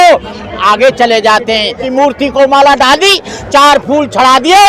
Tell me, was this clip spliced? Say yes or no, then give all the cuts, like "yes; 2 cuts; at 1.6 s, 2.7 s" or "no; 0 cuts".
yes; 1 cut; at 1.8 s